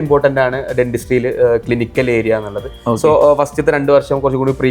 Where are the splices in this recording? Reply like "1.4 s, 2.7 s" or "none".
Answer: none